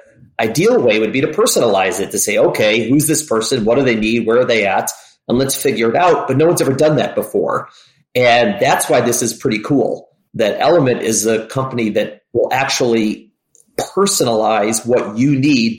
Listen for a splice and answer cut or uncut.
uncut